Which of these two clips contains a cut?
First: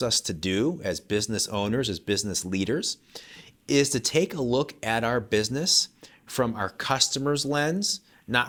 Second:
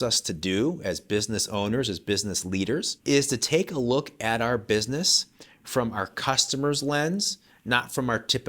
second; 1 cut; at 2.9 s

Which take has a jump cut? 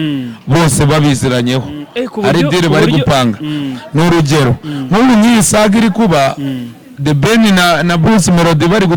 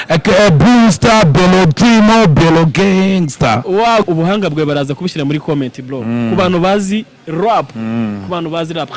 second; 1 cut; at 4.0 s

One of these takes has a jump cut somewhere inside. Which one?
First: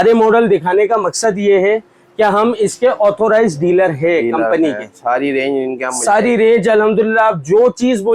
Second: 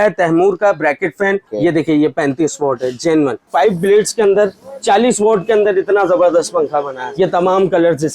second; 3 cuts; at 1.5 s, 3.5 s, 7.0 s

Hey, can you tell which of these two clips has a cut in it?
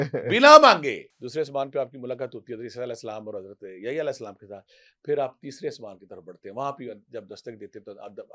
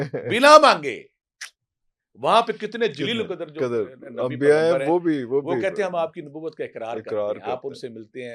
first; 1 cut; at 1.1 s

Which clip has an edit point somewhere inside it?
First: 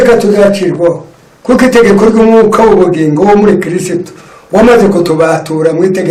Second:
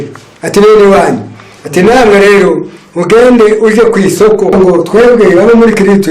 second; 1 cut; at 4.5 s

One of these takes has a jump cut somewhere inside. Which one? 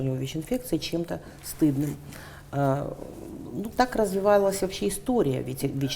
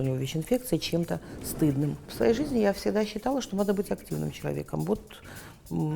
second; 1 cut; at 2.0 s

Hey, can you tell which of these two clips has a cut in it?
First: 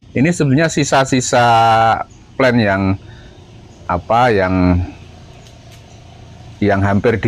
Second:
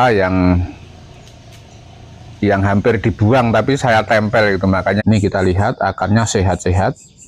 second; 1 cut; at 5.0 s

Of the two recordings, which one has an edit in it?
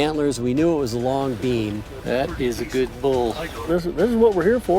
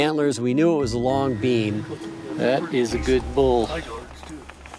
first; 2 cuts; at 1.9 s, 3.7 s

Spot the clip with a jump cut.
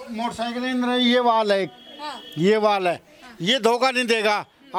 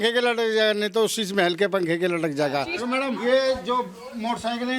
second; 1 cut; at 2.8 s

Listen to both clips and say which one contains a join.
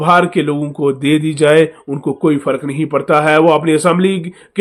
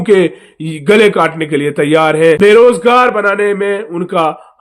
second; 1 cut; at 2.5 s

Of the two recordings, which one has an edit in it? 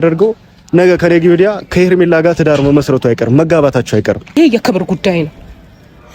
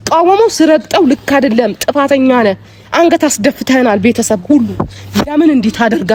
first; 1 cut; at 4.4 s

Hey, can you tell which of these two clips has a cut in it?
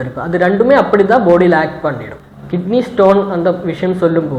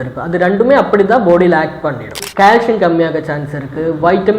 second; 1 cut; at 2.2 s

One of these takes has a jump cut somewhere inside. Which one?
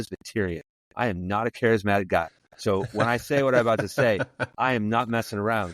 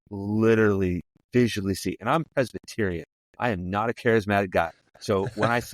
second; 1 cut; at 1.1 s

